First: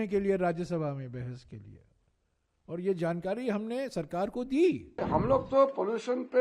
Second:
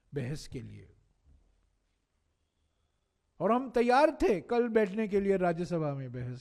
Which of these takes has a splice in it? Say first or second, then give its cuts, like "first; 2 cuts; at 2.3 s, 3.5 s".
first; 1 cut; at 4.9 s